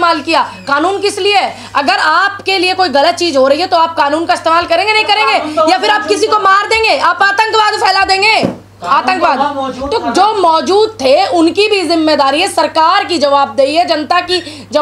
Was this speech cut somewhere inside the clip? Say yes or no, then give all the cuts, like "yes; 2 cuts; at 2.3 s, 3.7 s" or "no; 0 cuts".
no; 0 cuts